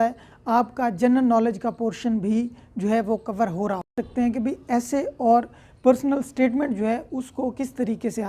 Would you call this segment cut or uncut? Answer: cut